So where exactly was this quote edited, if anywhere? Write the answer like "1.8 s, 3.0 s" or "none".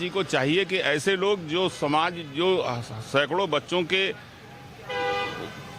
none